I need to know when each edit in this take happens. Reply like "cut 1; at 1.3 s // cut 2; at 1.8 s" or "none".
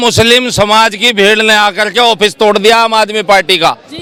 none